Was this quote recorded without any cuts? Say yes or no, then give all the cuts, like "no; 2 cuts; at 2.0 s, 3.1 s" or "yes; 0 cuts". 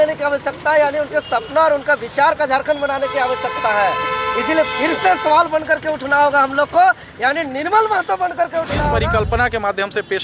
no; 1 cut; at 8.9 s